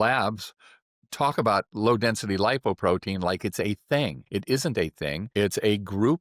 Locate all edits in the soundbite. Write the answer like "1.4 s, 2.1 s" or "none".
4.2 s, 5.2 s